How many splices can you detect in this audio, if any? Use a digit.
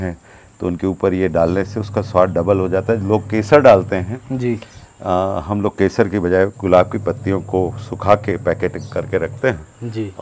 0